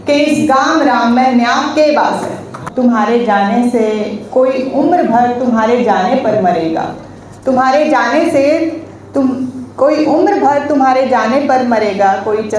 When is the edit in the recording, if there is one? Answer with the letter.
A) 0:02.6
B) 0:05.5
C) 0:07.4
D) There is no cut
A